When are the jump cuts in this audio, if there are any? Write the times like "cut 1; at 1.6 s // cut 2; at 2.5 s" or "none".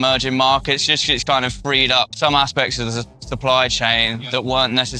cut 1; at 2.1 s